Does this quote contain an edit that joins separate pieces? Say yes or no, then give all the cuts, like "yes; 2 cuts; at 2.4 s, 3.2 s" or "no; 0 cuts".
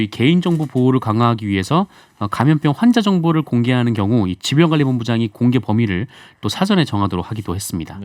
no; 0 cuts